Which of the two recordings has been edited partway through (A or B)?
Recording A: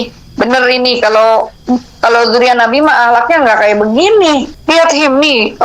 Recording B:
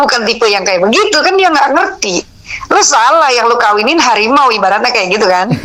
A